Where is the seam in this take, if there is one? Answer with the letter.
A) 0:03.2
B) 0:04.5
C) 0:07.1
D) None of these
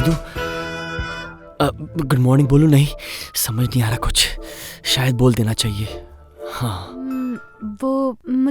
C